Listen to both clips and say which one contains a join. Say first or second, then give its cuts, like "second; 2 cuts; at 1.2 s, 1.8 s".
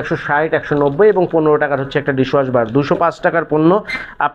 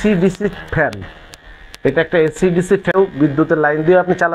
second; 1 cut; at 2.9 s